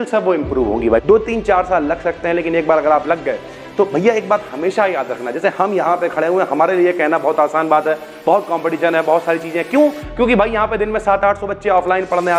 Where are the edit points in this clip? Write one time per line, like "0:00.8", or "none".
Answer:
0:01.0